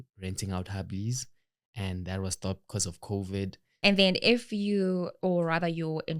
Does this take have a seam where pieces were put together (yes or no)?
yes